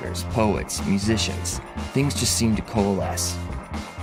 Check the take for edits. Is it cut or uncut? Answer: uncut